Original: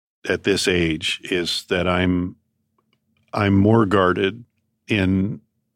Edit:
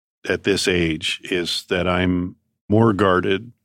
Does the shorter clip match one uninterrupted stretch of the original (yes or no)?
no